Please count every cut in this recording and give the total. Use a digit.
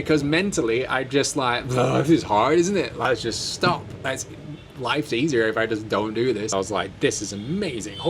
2